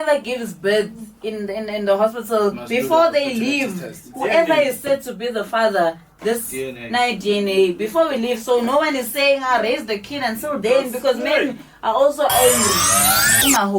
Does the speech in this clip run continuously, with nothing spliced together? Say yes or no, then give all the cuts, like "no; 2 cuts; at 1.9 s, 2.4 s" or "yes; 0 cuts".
no; 1 cut; at 12.9 s